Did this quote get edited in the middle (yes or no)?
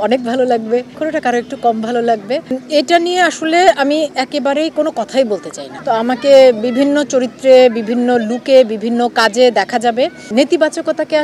yes